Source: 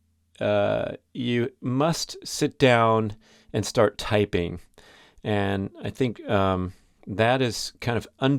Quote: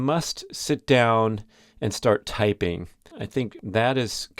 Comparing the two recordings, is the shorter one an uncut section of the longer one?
no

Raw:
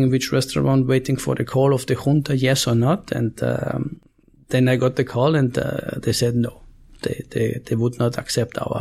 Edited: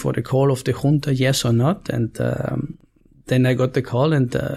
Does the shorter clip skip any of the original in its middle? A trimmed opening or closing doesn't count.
no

